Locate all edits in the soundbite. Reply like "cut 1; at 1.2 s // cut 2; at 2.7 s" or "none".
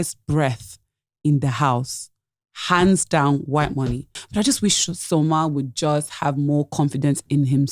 cut 1; at 4.2 s